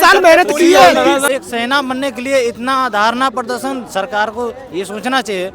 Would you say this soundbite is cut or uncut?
cut